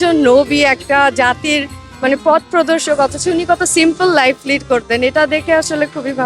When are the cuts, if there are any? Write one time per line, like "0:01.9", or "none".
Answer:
none